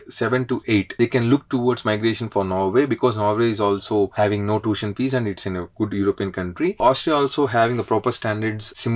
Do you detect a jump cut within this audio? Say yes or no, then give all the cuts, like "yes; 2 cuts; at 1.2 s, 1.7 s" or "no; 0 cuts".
yes; 2 cuts; at 0.9 s, 6.8 s